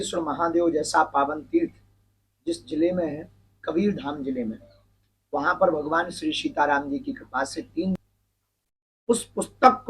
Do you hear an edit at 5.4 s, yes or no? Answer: no